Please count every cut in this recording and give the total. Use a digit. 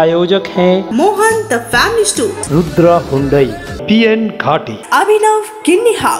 1